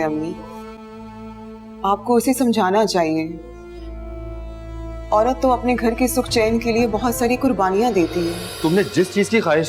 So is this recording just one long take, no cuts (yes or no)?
no